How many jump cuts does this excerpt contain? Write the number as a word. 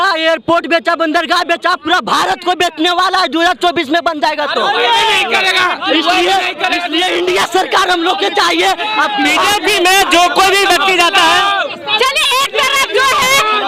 zero